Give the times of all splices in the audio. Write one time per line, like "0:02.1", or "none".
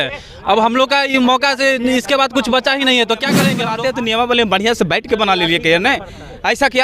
0:03.6